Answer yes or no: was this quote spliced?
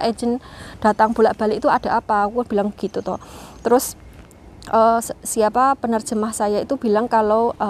no